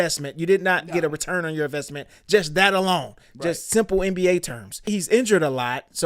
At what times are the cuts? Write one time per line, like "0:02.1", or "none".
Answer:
0:04.8